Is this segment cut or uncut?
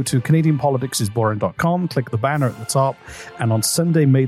uncut